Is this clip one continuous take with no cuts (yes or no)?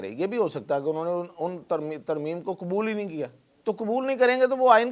no